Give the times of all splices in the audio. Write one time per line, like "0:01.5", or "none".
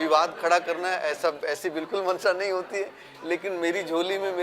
none

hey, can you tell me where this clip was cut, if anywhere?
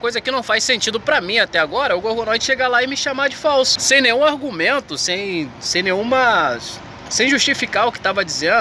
none

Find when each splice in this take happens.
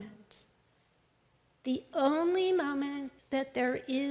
0:03.1

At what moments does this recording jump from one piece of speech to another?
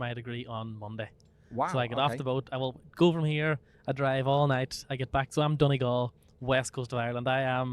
none

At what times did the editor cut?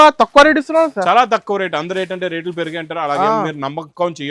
none

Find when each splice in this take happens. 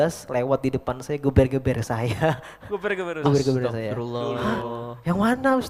none

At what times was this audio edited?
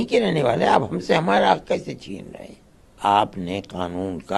0:03.0

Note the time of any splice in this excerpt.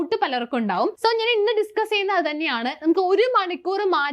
0:01.0

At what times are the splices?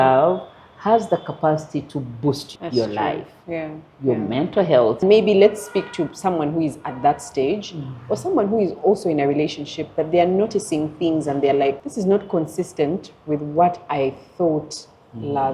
0:02.5
0:05.0
0:11.9

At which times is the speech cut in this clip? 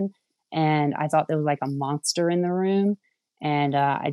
none

